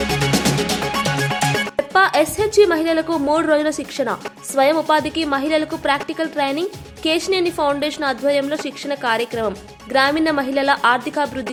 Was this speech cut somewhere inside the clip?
no; 0 cuts

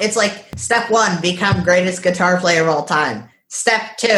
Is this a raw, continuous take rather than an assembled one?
yes; 0 cuts

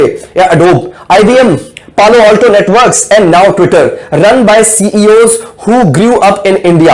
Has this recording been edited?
no; 0 cuts

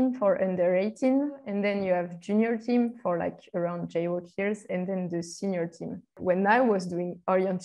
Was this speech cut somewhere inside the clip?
yes; 2 cuts; at 1.4 s, 6.2 s

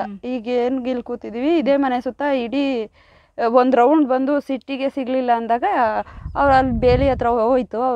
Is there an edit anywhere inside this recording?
no; 0 cuts

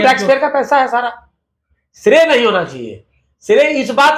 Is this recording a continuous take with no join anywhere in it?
yes; 0 cuts

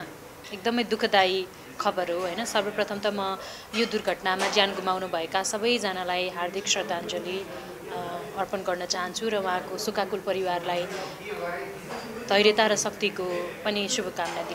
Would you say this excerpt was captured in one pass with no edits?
yes; 0 cuts

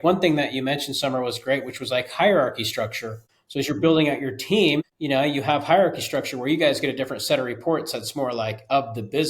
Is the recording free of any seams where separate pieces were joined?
no; 2 cuts; at 3.6 s, 4.9 s

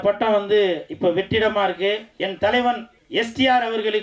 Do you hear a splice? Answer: yes; 2 cuts; at 2.1 s, 2.9 s

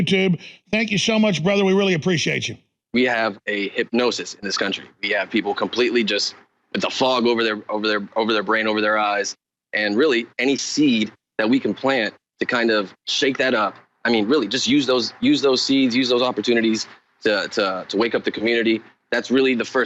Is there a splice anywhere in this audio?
yes; 1 cut; at 2.8 s

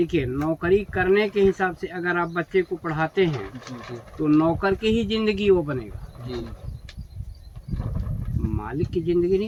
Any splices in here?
no; 0 cuts

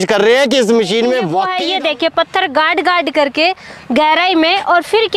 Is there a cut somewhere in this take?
yes; 1 cut; at 1.4 s

